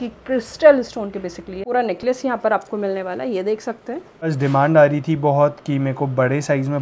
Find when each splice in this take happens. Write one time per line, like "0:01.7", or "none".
0:01.6
0:04.3